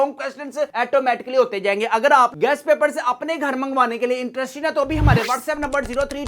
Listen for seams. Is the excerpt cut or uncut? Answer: uncut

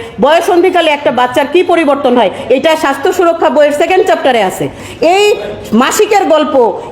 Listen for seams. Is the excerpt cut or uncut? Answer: cut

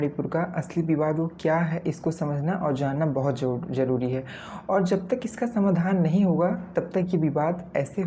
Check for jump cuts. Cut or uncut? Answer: uncut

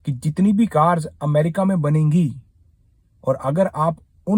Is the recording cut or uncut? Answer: uncut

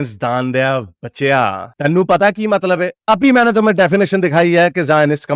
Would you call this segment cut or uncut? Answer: uncut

